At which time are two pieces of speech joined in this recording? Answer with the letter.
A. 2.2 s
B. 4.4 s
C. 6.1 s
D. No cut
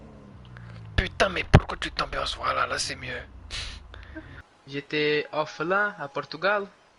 B